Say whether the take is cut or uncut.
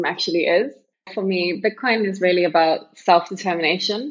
cut